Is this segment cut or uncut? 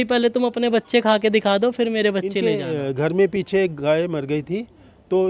cut